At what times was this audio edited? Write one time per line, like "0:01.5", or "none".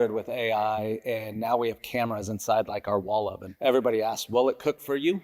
0:03.4